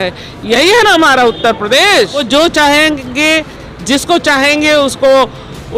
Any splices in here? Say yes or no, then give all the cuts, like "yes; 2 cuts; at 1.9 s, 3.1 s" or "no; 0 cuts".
yes; 1 cut; at 2.2 s